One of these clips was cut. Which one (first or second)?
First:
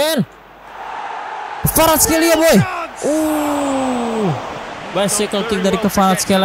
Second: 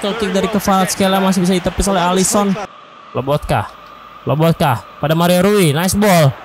second